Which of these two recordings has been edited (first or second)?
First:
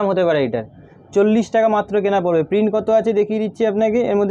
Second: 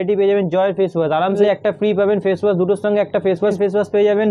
second